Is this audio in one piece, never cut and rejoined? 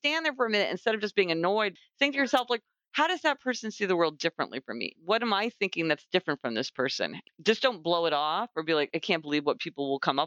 no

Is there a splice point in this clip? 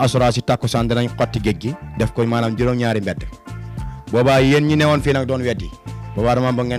no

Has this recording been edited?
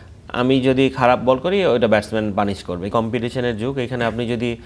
yes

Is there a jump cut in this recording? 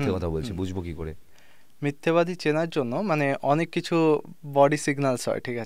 no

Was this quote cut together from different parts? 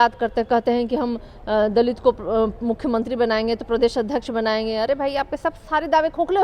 no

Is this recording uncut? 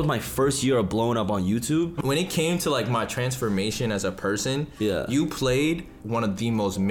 no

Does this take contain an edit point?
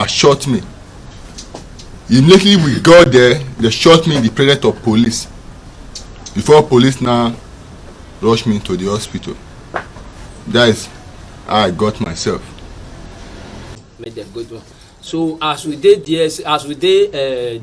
yes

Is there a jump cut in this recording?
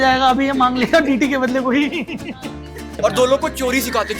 yes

